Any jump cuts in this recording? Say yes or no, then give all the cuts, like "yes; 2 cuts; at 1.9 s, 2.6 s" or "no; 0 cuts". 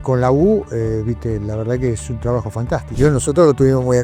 yes; 1 cut; at 2.9 s